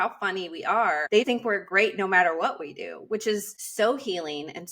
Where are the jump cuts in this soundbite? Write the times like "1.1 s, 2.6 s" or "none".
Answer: 1.2 s, 3.6 s